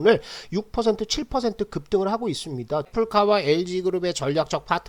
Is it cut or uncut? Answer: cut